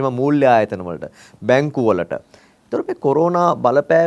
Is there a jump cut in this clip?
no; 0 cuts

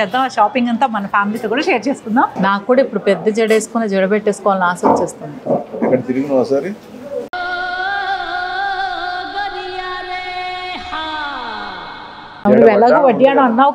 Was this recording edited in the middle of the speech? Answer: yes; 2 cuts; at 2.3 s, 12.4 s

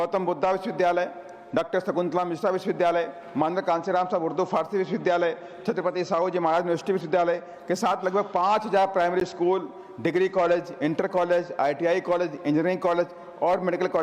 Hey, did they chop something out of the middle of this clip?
no; 0 cuts

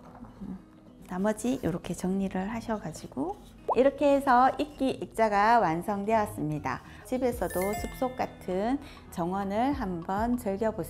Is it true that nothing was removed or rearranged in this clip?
no; 2 cuts; at 1.0 s, 7.0 s

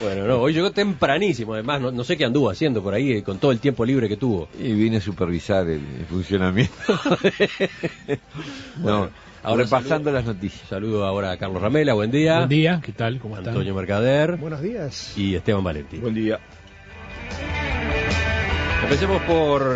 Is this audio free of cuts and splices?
no; 1 cut; at 5.1 s

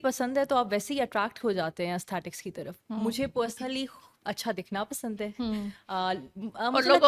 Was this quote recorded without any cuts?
yes; 0 cuts

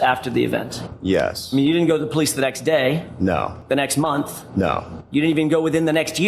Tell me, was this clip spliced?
yes; 1 cut; at 3.6 s

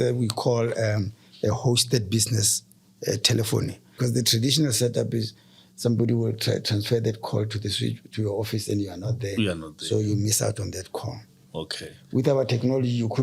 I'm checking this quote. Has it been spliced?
yes; 1 cut; at 3.9 s

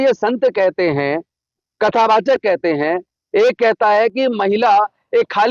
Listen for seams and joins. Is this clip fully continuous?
yes; 0 cuts

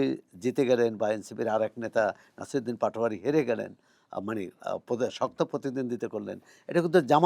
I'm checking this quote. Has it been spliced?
no; 0 cuts

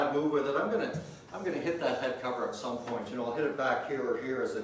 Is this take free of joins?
yes; 0 cuts

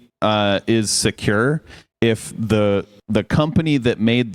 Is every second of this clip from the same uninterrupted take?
yes; 0 cuts

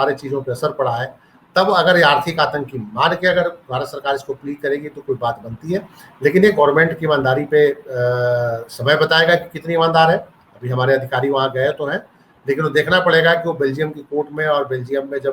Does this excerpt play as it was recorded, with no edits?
yes; 0 cuts

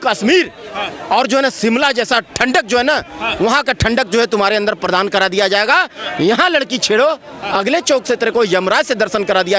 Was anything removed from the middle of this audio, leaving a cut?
no; 0 cuts

